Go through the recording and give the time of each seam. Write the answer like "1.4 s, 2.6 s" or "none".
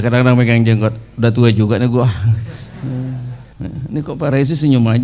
3.4 s